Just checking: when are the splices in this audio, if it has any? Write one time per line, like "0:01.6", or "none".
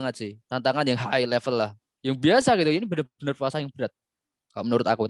0:01.9